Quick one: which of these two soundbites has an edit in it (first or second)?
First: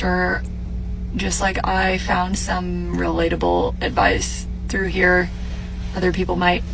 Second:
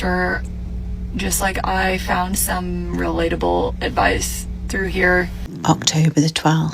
second